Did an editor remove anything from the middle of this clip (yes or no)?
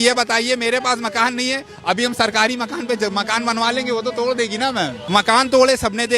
yes